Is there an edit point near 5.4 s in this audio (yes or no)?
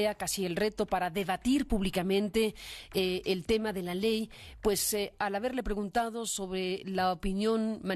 yes